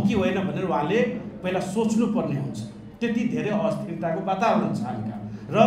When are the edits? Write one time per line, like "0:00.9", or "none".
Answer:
none